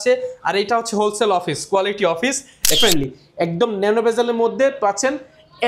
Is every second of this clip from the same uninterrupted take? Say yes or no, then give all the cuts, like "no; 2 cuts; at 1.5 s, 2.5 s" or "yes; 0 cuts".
no; 1 cut; at 2.8 s